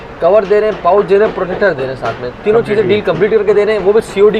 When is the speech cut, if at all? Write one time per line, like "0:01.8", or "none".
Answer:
none

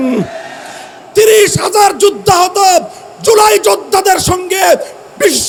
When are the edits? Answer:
none

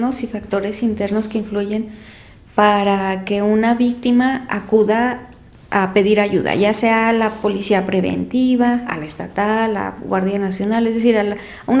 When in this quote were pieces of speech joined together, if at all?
none

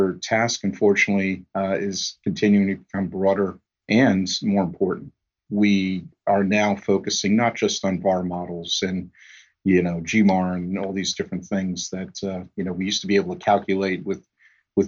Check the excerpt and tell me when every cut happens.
none

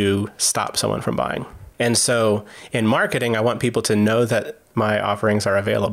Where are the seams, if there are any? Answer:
0:04.6

